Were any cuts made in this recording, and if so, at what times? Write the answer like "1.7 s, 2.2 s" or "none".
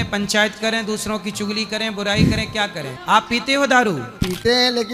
2.9 s, 4.1 s